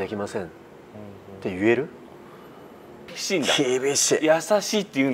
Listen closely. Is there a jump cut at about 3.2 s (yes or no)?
yes